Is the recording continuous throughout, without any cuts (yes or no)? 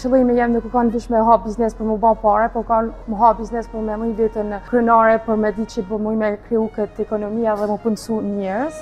no